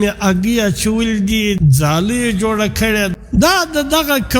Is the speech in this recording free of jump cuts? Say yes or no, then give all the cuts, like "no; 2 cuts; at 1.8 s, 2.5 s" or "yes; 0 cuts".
no; 2 cuts; at 1.6 s, 3.2 s